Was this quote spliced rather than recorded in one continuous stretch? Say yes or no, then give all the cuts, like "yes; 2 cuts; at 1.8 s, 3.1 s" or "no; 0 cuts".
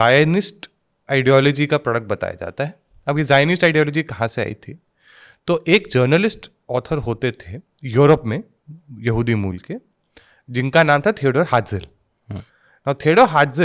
no; 0 cuts